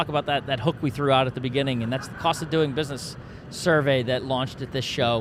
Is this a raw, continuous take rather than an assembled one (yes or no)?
yes